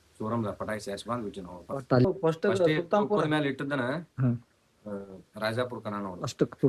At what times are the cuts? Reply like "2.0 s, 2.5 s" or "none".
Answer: 2.1 s